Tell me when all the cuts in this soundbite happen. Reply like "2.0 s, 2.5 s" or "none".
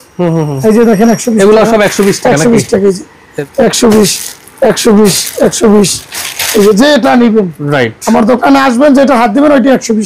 3.3 s

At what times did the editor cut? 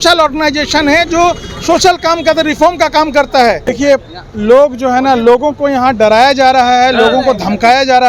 3.7 s

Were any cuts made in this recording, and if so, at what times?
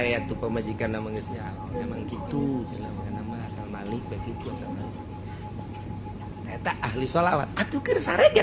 none

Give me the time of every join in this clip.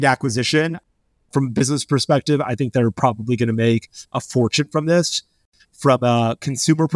5.4 s

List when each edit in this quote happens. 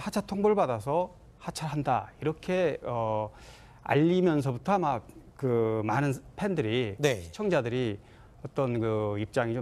6.9 s

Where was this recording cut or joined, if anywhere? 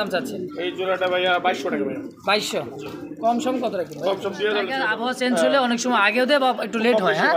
5.1 s

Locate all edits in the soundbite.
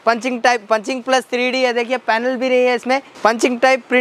3.1 s

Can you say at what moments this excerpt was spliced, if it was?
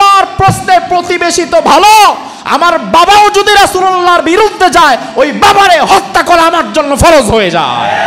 none

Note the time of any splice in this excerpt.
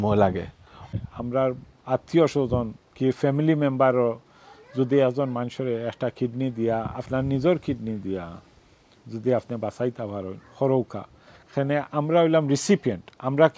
0.9 s

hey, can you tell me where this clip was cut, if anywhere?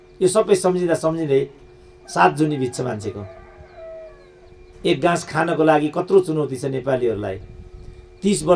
none

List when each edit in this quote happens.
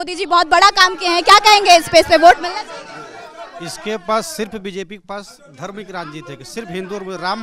none

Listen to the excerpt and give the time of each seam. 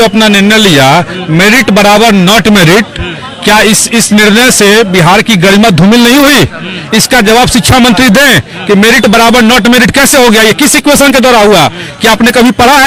none

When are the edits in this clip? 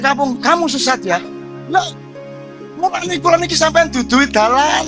none

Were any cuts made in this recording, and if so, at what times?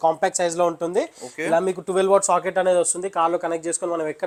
none

